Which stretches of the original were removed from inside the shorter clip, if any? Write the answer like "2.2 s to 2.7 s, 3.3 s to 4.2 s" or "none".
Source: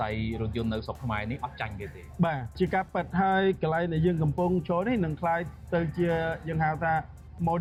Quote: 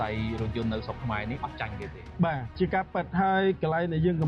none